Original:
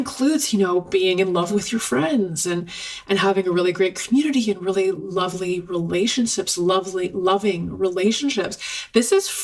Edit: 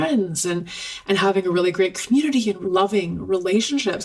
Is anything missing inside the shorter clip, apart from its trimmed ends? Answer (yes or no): yes